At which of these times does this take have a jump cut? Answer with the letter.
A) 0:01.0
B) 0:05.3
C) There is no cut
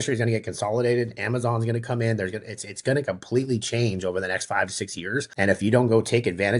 B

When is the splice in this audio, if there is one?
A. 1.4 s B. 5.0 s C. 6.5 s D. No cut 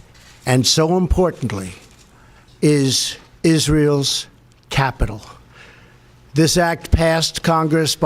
B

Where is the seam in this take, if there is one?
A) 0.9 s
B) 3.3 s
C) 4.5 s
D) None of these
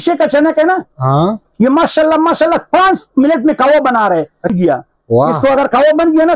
C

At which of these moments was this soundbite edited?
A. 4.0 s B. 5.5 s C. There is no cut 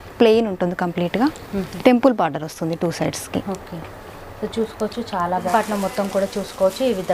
B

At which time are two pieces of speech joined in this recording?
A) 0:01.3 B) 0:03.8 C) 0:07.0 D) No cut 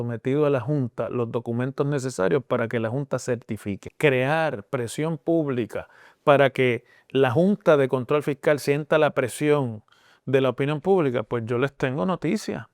B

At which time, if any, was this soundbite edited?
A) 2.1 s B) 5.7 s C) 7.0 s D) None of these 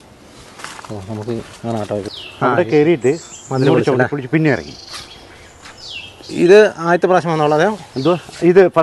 A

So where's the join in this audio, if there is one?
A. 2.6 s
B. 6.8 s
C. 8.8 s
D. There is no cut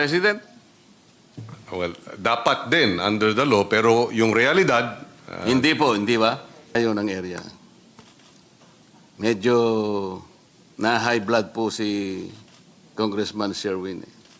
B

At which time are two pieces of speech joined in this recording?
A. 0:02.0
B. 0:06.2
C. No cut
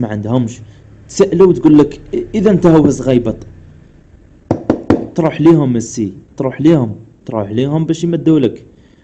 B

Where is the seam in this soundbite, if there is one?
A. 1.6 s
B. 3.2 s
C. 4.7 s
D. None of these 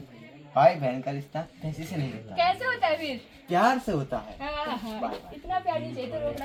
D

